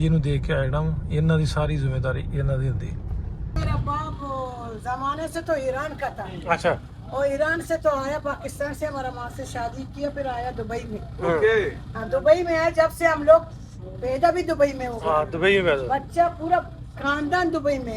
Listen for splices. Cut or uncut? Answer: cut